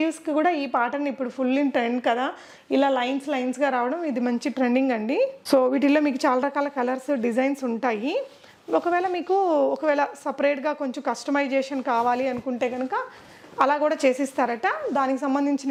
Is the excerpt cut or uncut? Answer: uncut